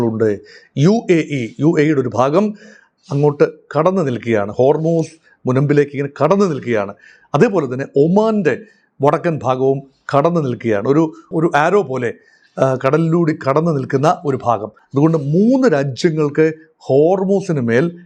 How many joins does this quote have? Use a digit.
1